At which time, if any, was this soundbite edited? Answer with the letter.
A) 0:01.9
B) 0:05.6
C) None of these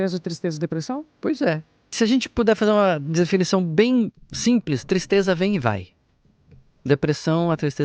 A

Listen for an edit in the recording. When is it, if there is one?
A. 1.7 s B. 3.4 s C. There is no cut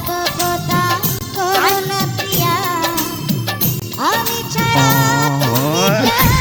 C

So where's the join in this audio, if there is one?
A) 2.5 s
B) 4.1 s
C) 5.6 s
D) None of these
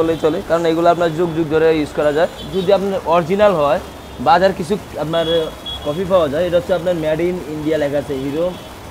A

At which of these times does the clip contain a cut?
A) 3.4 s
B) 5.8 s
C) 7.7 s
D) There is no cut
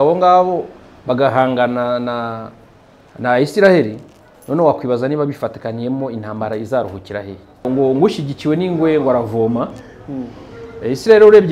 C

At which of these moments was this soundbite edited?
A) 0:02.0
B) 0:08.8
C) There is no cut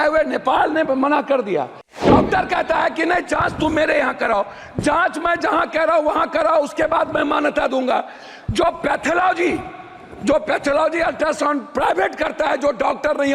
A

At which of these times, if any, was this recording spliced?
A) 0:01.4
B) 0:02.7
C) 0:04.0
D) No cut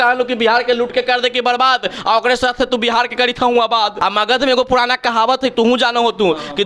C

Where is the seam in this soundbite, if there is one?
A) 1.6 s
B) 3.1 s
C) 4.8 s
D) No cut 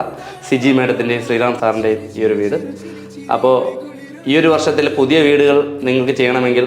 A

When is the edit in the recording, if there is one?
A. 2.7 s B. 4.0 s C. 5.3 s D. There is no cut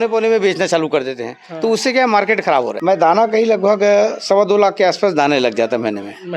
A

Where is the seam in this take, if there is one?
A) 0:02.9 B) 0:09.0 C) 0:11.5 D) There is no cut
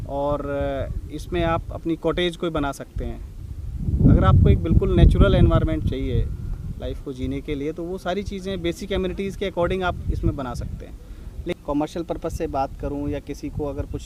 C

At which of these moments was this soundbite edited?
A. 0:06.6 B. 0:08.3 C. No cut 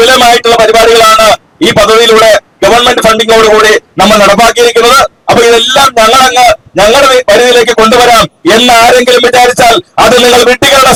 C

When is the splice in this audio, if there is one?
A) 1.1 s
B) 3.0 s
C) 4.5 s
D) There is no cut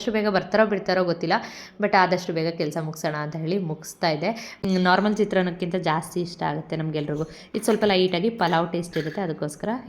C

